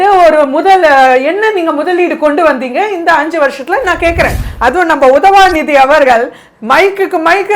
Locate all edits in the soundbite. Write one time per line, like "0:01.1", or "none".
0:04.4